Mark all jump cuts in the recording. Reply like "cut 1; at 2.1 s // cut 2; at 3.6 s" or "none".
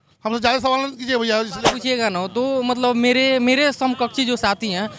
cut 1; at 1.7 s